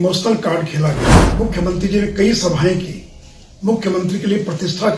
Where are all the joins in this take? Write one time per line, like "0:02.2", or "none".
0:01.2